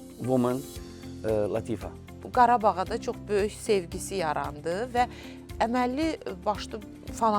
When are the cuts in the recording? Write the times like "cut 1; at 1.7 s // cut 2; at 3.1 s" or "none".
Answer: cut 1; at 2.1 s